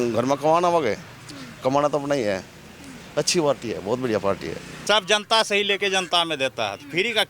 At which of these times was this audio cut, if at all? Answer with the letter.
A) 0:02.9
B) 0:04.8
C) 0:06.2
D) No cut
B